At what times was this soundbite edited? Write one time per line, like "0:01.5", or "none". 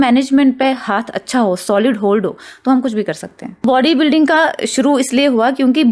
0:03.6

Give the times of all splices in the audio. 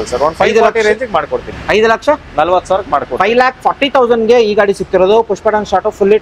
none

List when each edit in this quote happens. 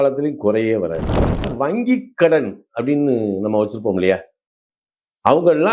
0:01.5

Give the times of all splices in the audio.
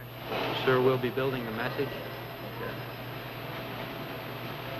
0:03.7

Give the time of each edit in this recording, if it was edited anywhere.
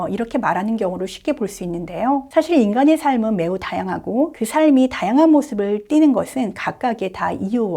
0:02.3
0:04.4

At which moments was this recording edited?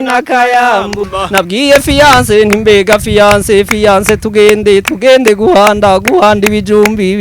0:01.1

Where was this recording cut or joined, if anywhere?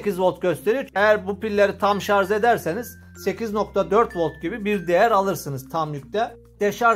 none

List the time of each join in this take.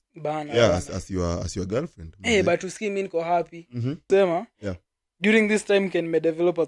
0:04.0

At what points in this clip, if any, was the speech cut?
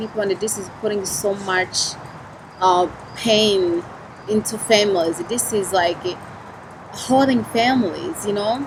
none

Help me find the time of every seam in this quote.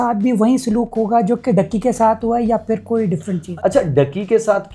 0:03.4

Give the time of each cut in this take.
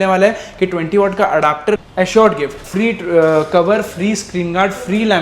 0:01.9
0:02.6

